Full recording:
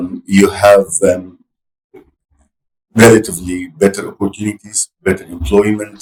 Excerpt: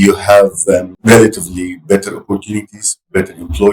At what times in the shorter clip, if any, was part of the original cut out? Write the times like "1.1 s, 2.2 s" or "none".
0.9 s